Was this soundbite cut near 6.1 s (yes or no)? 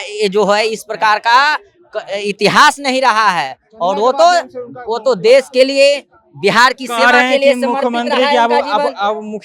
no